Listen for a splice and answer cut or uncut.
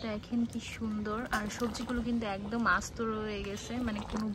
uncut